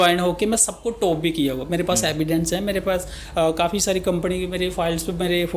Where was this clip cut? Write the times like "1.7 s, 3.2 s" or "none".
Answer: none

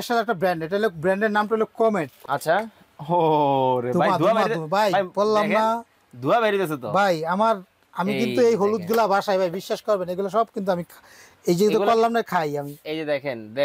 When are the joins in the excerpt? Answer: 2.2 s

